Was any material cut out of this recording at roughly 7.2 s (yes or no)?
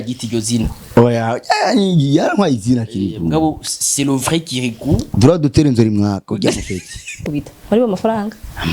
yes